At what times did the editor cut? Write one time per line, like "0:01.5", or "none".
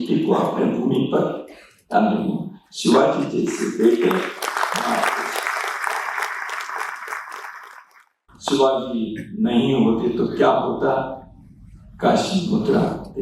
0:08.2